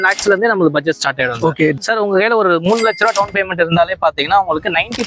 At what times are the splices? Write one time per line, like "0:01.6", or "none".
0:01.8